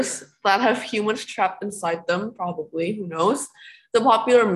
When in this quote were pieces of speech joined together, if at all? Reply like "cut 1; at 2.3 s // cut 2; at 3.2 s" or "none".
none